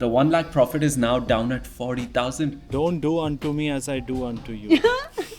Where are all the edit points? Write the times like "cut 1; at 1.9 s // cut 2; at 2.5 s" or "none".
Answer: cut 1; at 2.6 s